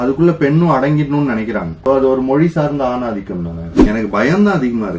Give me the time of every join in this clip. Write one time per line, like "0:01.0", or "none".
0:01.7
0:03.9